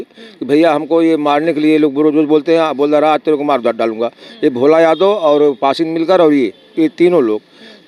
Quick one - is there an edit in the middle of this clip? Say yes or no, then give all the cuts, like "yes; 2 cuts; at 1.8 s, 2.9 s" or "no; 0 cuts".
no; 0 cuts